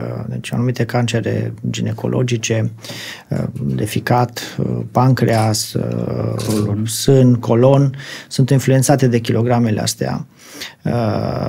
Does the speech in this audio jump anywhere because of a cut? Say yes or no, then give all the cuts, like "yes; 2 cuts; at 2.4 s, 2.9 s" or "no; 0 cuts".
no; 0 cuts